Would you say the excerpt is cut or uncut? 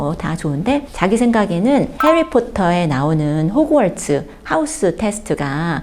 uncut